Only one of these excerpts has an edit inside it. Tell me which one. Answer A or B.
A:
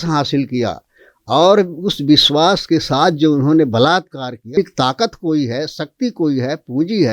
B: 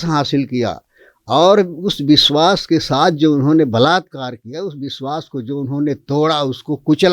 A